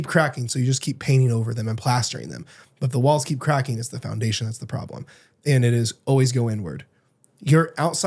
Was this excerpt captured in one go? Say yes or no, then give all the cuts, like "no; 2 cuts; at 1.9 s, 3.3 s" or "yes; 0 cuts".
yes; 0 cuts